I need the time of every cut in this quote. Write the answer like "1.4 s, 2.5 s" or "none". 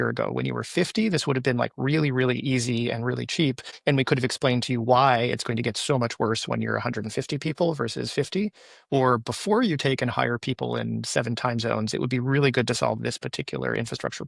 3.7 s